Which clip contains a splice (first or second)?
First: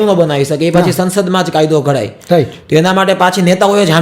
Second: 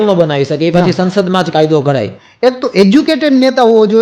second